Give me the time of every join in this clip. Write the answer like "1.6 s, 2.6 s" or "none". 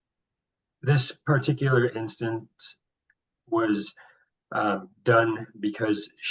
none